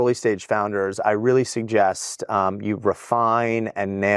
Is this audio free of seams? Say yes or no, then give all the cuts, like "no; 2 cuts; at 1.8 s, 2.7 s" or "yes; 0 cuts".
yes; 0 cuts